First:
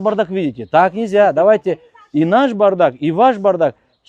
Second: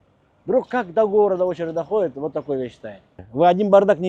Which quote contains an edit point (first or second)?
second